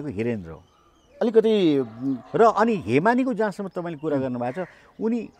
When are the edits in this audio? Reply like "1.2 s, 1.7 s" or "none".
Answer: none